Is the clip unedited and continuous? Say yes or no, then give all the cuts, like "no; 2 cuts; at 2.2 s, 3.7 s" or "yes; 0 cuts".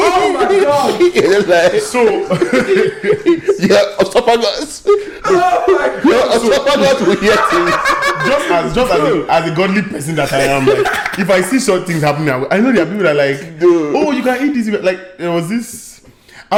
yes; 0 cuts